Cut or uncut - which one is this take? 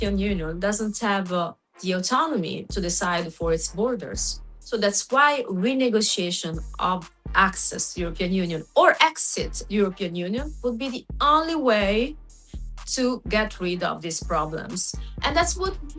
uncut